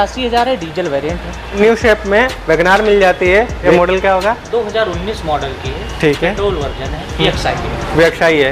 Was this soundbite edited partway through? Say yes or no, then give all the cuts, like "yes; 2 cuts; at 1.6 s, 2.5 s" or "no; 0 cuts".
yes; 3 cuts; at 1.6 s, 3.6 s, 7.2 s